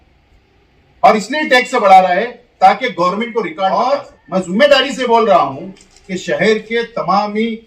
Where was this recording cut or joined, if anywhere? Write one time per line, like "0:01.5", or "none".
0:03.5